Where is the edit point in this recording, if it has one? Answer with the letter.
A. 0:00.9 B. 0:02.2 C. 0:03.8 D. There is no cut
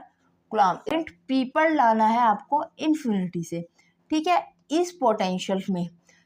A